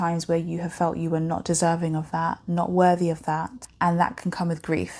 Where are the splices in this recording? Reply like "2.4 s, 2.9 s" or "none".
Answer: 3.6 s